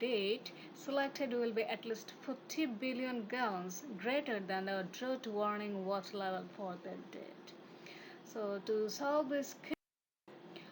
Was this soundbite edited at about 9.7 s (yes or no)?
yes